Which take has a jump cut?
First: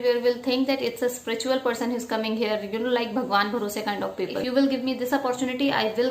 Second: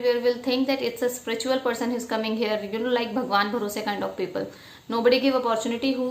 first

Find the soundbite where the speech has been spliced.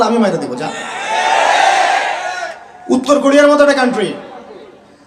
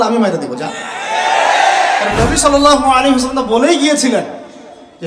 second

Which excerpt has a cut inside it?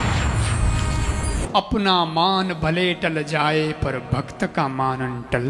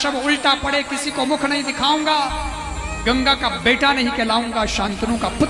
first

